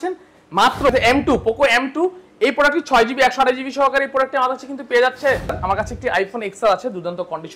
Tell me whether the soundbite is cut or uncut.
cut